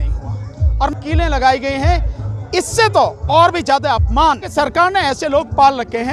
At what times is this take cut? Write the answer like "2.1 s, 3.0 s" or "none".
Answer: 0.9 s, 4.5 s